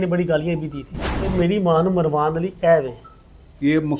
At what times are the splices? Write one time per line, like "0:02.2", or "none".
0:01.3